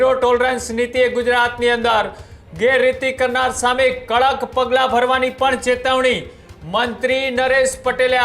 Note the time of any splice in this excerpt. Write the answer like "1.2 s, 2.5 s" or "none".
none